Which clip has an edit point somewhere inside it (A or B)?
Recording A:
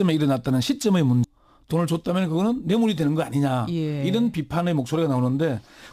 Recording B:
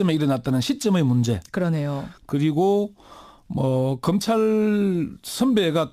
B